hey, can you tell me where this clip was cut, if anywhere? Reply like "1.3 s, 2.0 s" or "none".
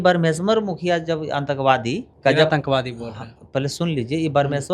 2.1 s

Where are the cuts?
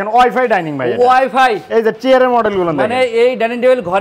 none

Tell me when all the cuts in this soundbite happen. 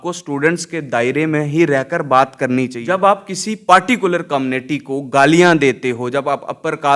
2.8 s

